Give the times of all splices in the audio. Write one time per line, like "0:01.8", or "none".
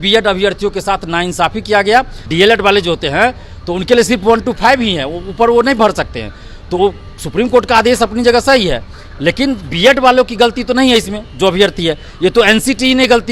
0:02.2

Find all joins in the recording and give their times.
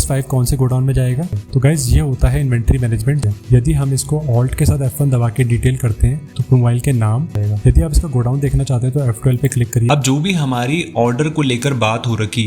0:01.3
0:03.2
0:07.4
0:09.8

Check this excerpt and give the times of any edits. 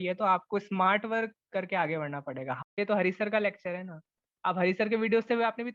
0:02.6

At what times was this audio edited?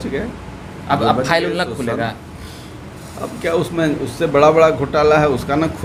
none

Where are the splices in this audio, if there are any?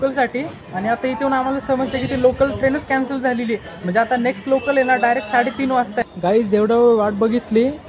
0:06.1

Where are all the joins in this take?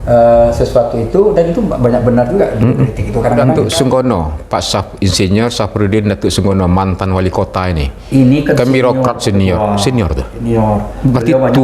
0:03.5

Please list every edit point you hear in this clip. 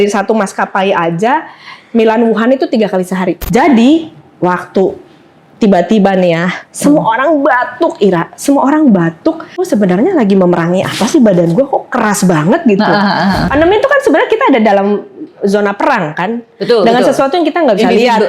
0:03.4
0:09.6
0:13.5

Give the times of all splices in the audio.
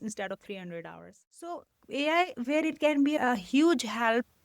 0:01.7
0:03.2

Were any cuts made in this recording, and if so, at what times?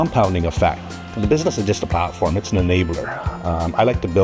none

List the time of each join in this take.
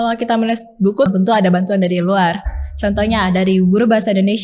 0:01.1

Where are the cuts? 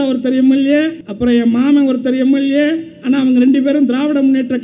0:01.0

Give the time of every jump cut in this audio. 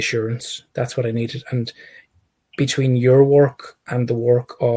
none

